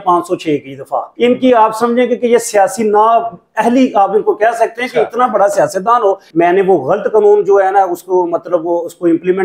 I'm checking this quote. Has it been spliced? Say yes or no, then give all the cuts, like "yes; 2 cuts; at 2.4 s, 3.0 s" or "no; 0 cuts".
yes; 2 cuts; at 1.0 s, 6.2 s